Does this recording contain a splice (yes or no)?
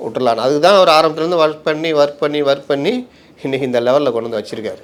no